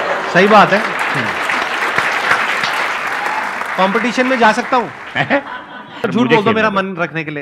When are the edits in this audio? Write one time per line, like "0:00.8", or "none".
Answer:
0:03.0
0:06.0